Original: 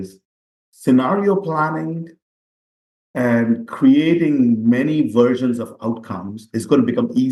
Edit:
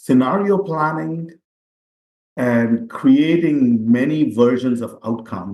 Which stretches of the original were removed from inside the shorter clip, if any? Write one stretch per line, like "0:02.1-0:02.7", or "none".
none